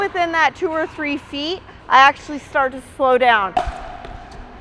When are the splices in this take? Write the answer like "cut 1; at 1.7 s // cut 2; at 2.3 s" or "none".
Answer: cut 1; at 3.5 s